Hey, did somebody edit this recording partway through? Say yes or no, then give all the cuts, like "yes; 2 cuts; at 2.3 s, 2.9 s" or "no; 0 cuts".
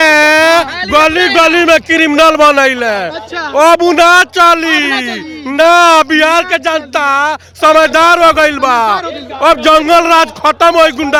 no; 0 cuts